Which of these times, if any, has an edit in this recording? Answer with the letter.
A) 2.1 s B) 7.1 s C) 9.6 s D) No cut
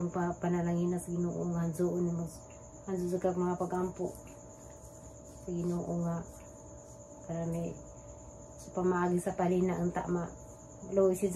D